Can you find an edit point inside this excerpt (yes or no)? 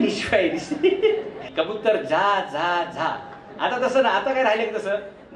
yes